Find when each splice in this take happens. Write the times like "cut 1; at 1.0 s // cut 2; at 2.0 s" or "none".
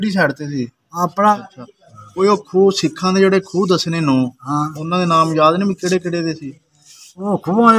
cut 1; at 1.4 s